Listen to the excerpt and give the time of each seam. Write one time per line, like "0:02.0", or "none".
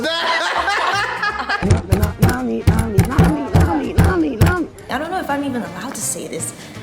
0:01.6
0:04.8